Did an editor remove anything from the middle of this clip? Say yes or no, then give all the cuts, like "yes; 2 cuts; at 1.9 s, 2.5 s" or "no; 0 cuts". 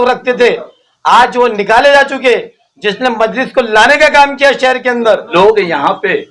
yes; 1 cut; at 5.3 s